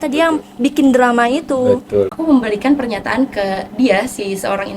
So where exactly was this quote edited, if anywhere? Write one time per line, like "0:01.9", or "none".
0:02.2